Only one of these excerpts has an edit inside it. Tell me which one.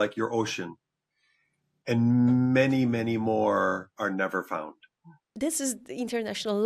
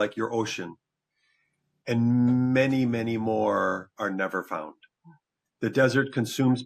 first; 1 cut; at 5.3 s

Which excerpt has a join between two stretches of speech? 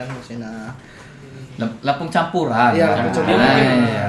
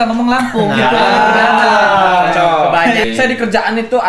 second; 1 cut; at 3.0 s

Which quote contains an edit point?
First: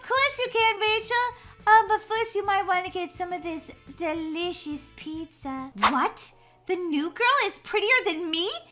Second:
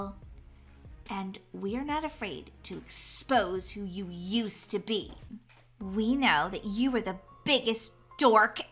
first; 1 cut; at 5.7 s

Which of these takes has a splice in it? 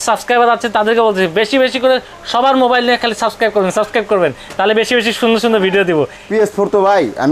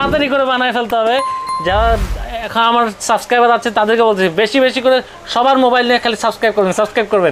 first; 1 cut; at 6.2 s

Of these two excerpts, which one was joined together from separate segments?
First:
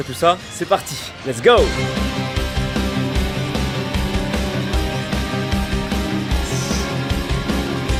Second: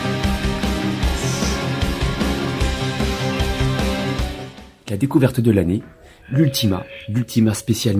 second; 1 cut; at 4.5 s

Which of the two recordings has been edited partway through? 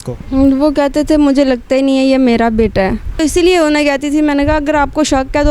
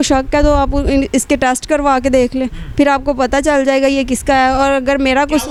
first; 1 cut; at 3.1 s

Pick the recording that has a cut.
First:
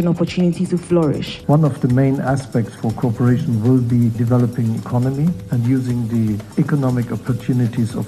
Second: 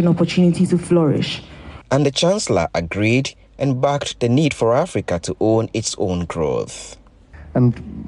first; 4 cuts; at 1.3 s, 4.2 s, 5.5 s, 6.5 s

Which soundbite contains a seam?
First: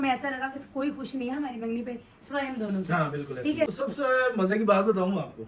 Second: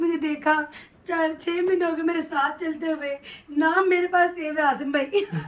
first; 1 cut; at 3.7 s

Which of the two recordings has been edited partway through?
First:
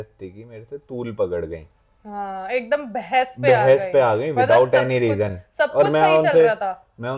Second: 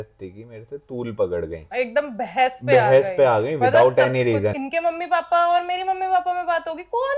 second; 2 cuts; at 1.7 s, 4.6 s

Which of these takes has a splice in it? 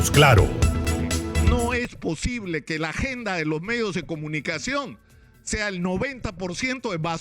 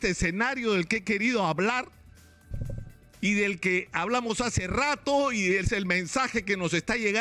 first; 1 cut; at 1.4 s

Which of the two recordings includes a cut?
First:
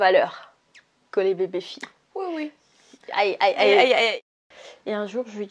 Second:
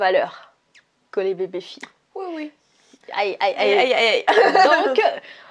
first; 1 cut; at 4.1 s

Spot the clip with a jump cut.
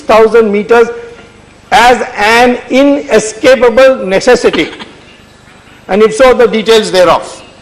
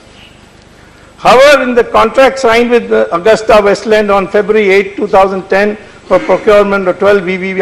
second; 1 cut; at 3.0 s

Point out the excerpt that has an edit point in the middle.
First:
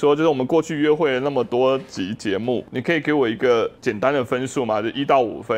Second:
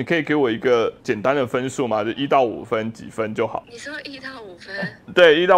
second; 1 cut; at 3.7 s

